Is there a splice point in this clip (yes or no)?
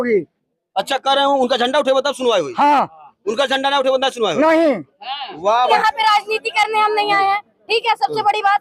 yes